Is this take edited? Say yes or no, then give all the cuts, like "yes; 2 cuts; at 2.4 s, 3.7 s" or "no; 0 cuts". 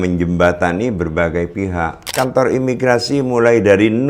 yes; 1 cut; at 2.1 s